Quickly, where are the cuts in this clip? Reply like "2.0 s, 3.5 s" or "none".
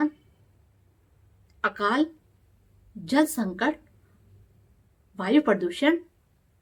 none